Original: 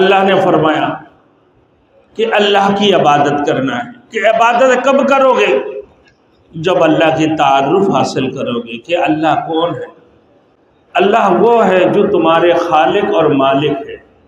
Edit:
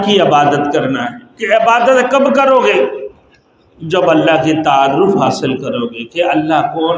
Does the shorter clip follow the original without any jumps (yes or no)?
yes